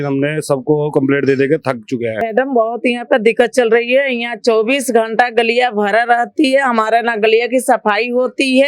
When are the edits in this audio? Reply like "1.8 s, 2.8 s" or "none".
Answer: 2.2 s